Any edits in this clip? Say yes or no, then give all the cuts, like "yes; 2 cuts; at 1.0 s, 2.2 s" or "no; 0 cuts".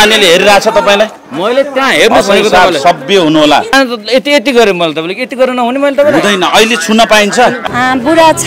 yes; 2 cuts; at 3.7 s, 7.6 s